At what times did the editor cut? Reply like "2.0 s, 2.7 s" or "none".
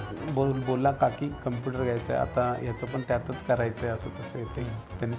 none